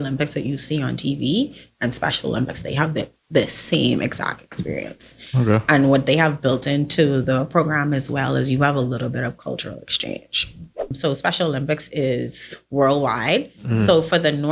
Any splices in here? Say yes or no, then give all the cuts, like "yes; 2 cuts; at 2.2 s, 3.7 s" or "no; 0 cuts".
yes; 1 cut; at 11.0 s